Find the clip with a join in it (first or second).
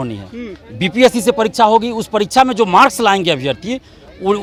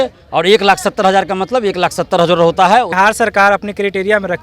second